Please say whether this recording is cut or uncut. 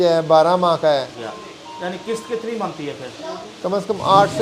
cut